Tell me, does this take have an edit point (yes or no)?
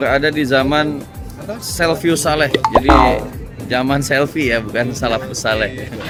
no